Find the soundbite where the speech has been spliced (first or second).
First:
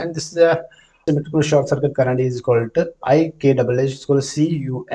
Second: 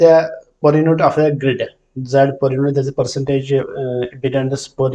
first